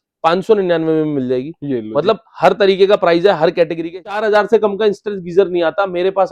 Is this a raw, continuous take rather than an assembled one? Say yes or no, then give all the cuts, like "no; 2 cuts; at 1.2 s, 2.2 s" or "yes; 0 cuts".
no; 1 cut; at 4.1 s